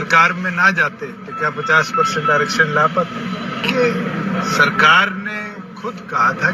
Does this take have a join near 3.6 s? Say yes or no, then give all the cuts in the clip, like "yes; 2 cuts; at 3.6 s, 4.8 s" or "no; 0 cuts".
yes; 1 cut; at 3.6 s